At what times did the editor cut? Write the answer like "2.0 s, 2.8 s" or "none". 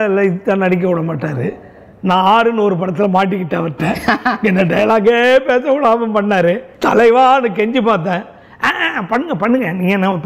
6.7 s